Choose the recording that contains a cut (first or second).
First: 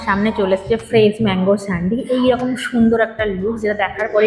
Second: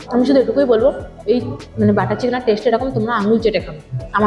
second